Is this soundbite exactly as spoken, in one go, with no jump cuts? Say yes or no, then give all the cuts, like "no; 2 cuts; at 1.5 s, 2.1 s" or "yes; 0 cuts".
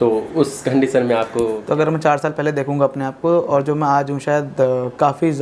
no; 1 cut; at 1.6 s